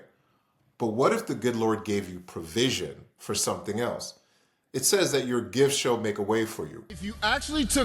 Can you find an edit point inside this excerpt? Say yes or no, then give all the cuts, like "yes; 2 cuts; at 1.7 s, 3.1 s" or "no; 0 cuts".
yes; 1 cut; at 6.8 s